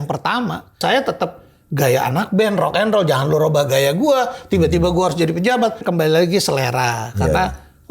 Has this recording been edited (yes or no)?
yes